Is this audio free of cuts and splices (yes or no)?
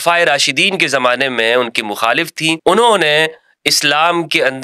no